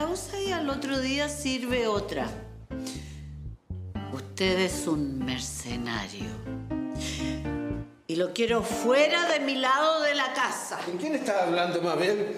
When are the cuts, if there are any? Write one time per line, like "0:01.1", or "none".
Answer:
0:02.9